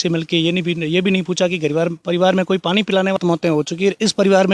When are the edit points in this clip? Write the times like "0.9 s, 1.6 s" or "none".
3.2 s